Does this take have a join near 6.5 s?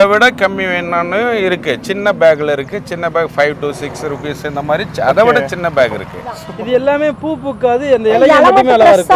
yes; 1 cut; at 6.5 s

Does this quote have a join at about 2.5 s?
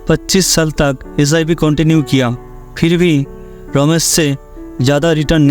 no; 0 cuts

